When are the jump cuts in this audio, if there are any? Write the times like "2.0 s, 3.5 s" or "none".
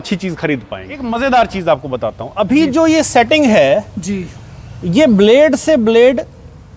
1.1 s